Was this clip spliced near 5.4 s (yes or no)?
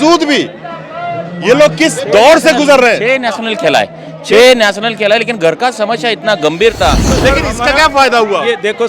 no